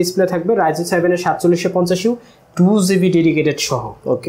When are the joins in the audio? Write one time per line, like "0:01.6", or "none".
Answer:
none